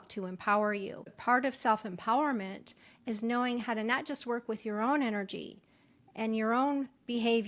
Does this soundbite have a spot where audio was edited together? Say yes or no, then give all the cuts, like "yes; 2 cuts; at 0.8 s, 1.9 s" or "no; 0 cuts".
yes; 1 cut; at 1.1 s